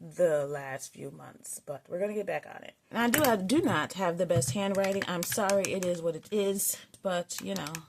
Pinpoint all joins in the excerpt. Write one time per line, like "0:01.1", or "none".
0:02.8
0:06.9